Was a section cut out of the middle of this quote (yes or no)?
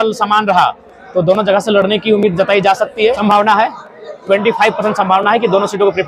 yes